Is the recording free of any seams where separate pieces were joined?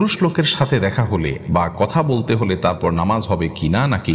yes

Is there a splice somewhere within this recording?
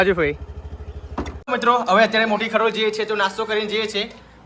yes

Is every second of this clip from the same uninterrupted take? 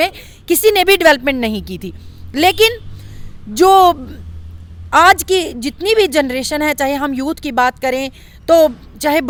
yes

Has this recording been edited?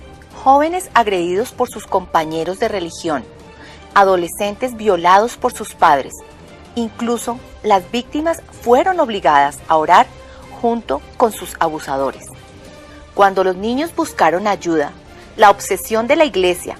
no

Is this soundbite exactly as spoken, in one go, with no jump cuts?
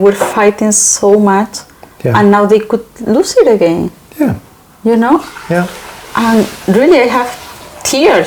yes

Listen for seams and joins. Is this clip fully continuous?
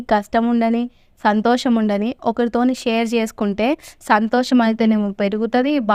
yes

